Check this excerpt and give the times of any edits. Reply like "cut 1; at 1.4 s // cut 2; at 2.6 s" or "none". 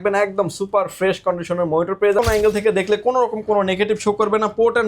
cut 1; at 2.2 s